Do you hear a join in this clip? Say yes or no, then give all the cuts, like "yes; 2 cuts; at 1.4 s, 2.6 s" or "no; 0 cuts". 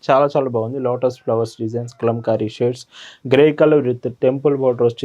no; 0 cuts